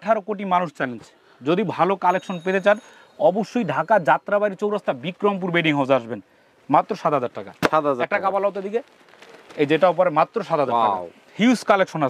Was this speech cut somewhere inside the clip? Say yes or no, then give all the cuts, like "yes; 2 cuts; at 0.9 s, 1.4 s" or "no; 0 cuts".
no; 0 cuts